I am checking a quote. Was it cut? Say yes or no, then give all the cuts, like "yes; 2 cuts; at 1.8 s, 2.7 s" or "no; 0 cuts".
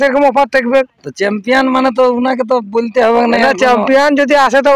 no; 0 cuts